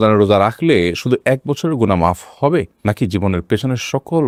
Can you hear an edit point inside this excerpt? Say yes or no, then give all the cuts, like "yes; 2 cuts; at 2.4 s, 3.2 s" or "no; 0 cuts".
no; 0 cuts